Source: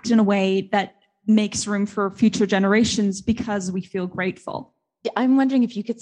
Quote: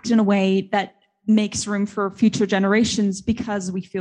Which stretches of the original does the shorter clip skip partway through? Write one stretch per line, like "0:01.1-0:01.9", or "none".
none